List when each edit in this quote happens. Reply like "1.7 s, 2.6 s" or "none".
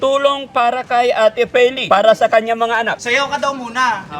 1.8 s, 3.0 s